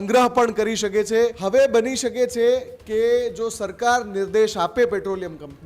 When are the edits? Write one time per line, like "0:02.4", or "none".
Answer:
0:01.4